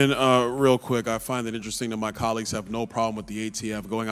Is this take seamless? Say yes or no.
yes